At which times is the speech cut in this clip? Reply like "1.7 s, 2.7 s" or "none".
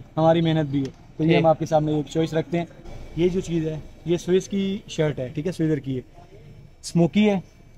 2.8 s